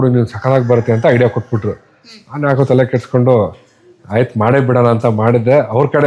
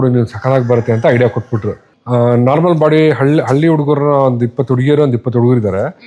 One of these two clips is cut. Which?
second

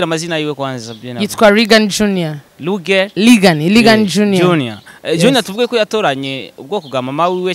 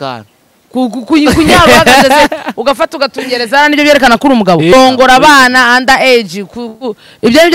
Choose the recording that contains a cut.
second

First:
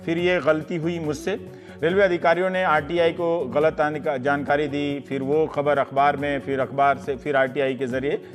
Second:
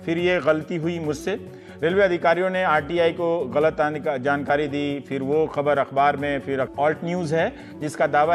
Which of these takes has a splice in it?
first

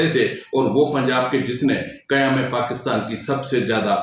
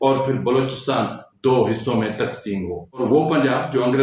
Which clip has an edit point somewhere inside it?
second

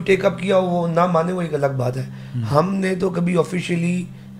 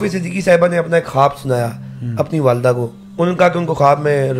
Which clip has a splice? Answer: second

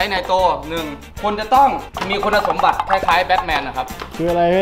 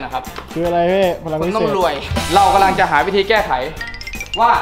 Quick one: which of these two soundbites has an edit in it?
second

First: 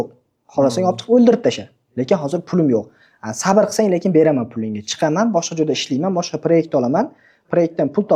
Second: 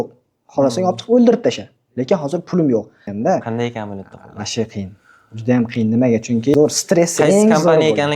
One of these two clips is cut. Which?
second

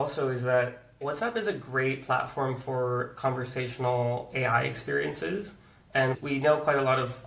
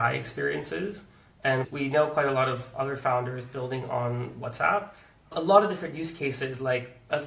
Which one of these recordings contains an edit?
first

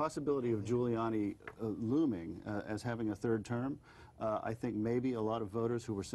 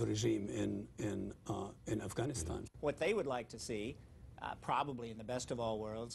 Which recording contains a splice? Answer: second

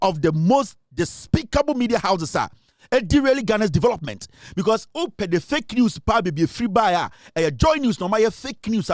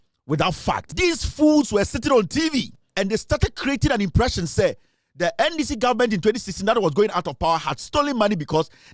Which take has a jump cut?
second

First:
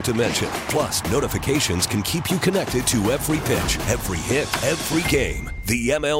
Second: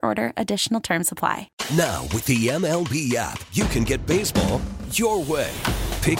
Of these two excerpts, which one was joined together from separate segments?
second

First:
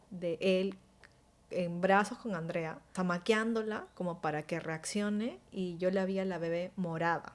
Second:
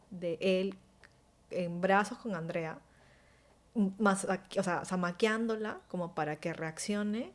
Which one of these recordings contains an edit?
first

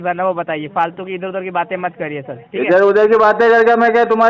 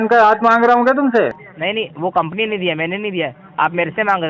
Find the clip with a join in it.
second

